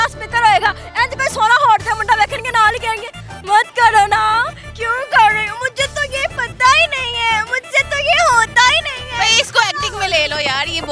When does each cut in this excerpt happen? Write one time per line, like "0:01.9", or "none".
none